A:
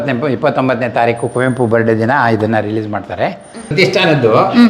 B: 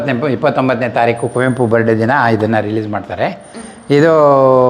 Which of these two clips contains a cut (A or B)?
A